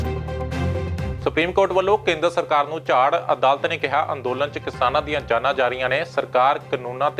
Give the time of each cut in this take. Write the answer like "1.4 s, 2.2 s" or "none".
1.1 s